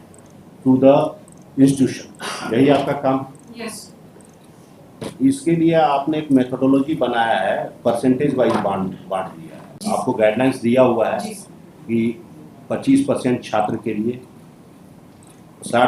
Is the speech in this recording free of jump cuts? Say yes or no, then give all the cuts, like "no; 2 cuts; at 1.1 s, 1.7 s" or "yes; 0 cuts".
no; 1 cut; at 9.8 s